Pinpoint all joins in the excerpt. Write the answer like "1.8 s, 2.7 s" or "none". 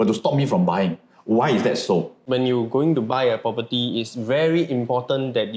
2.2 s